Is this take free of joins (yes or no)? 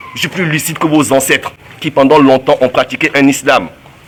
yes